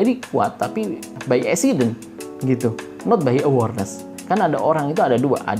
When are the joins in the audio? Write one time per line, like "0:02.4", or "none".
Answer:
0:01.1